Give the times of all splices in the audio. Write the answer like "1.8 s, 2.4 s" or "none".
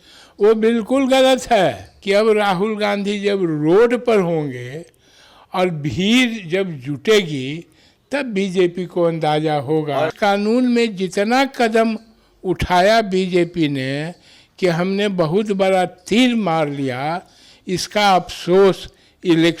1.9 s, 10.1 s